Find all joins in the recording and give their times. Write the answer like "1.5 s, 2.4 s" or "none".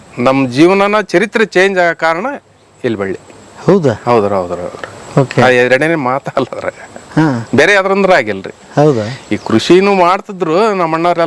none